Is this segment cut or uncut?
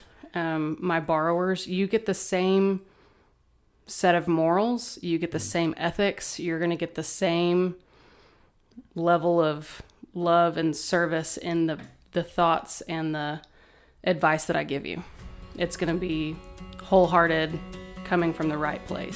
uncut